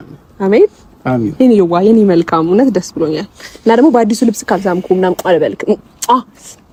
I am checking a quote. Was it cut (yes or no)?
no